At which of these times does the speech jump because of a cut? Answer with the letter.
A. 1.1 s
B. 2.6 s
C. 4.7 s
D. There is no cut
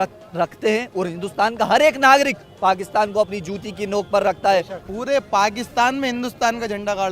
C